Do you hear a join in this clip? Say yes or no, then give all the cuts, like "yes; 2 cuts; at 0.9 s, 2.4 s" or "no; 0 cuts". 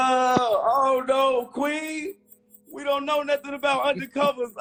no; 0 cuts